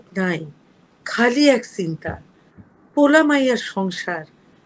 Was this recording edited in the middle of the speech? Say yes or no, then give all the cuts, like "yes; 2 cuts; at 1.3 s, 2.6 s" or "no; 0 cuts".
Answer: no; 0 cuts